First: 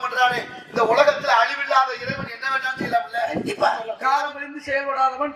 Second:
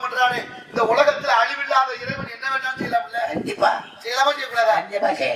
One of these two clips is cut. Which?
first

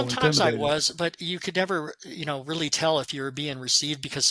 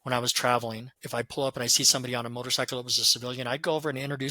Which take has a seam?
second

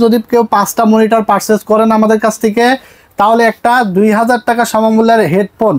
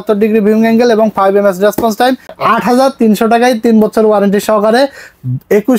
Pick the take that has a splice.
second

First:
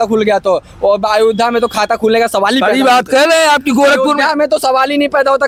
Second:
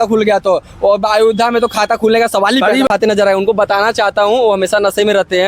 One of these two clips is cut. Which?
second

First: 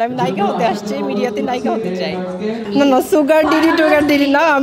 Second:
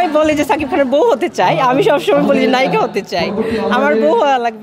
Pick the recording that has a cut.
first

